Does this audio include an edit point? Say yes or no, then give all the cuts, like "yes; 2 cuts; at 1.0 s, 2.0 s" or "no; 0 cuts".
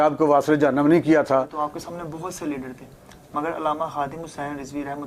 yes; 1 cut; at 1.6 s